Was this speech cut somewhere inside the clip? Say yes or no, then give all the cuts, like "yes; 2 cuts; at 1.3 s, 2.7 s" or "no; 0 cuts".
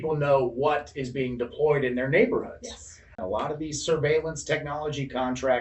yes; 1 cut; at 3.2 s